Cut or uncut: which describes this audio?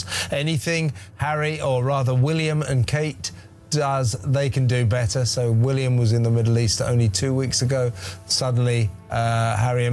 uncut